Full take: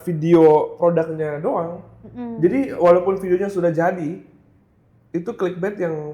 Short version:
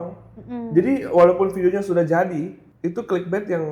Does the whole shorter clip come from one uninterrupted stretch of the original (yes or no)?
no